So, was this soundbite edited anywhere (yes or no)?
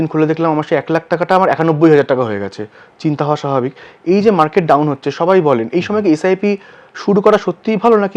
no